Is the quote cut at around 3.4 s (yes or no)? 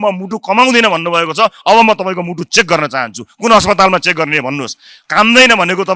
no